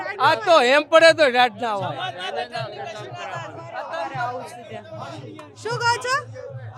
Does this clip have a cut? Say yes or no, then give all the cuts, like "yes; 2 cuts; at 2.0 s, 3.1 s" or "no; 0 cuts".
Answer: no; 0 cuts